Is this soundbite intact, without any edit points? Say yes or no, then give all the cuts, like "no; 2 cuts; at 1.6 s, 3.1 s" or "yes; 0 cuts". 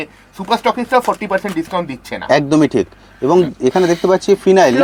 yes; 0 cuts